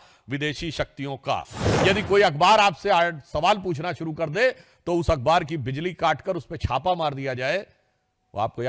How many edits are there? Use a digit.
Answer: 1